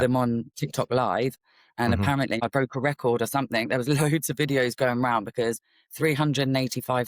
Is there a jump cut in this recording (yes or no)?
yes